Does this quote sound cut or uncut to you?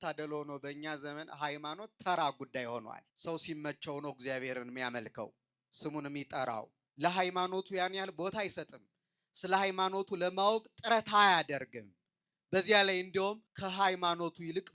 cut